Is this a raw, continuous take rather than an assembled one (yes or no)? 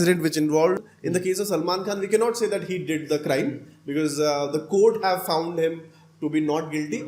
no